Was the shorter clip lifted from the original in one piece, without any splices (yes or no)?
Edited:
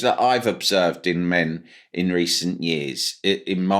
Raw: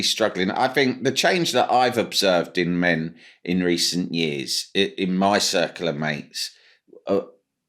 yes